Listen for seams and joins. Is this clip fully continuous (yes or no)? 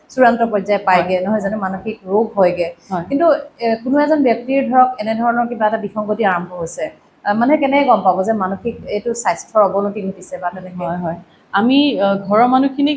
yes